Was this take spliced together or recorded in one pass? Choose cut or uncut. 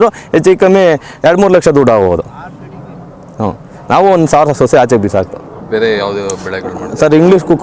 uncut